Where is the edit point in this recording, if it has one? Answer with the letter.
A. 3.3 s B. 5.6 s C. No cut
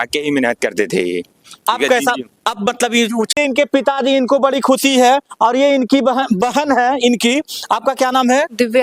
A